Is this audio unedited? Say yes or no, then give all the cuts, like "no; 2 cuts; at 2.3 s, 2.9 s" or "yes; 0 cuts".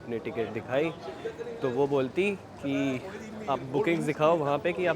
yes; 0 cuts